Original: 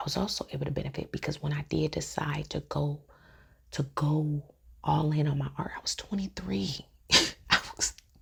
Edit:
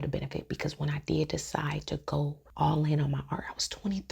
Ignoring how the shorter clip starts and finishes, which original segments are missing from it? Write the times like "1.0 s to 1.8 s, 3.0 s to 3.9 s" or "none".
3.0 s to 4.7 s